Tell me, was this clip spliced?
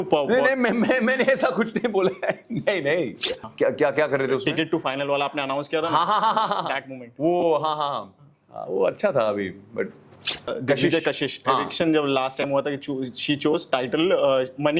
yes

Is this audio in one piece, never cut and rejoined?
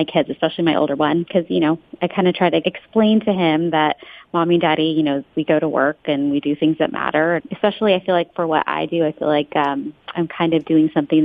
no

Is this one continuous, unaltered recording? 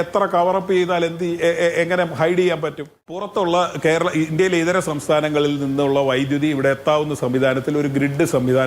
no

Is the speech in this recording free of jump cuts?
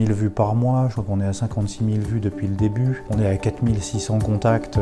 no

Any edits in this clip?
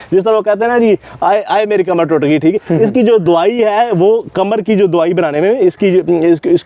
no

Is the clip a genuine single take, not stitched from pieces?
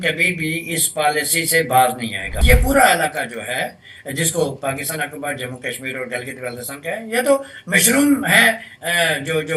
no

